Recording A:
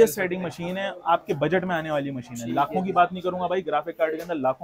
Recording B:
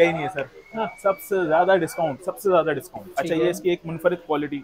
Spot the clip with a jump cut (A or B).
B